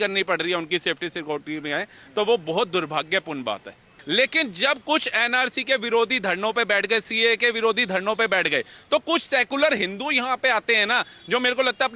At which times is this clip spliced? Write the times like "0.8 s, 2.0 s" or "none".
4.0 s